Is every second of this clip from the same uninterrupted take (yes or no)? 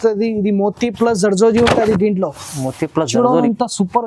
yes